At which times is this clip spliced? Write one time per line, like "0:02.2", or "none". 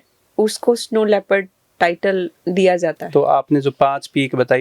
0:03.0